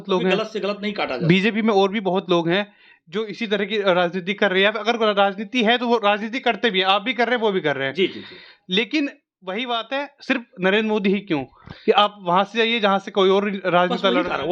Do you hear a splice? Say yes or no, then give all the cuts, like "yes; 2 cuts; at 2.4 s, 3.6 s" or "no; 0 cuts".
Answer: no; 0 cuts